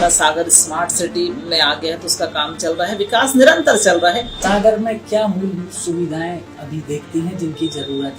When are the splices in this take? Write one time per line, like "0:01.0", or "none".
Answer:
0:04.3